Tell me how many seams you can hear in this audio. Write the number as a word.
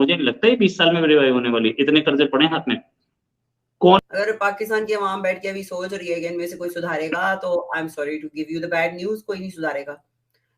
one